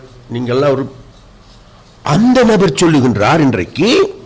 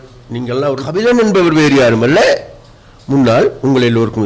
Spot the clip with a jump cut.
second; 1 cut; at 0.9 s

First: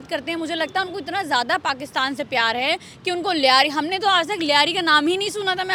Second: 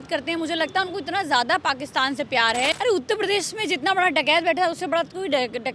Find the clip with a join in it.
second; 1 cut; at 2.7 s

